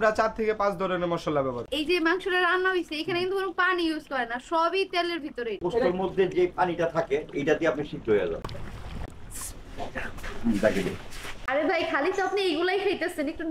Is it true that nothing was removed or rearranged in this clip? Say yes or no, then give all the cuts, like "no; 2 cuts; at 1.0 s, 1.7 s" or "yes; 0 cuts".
no; 4 cuts; at 1.6 s, 5.5 s, 9.0 s, 11.4 s